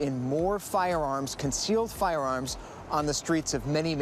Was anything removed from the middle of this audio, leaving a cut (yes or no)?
no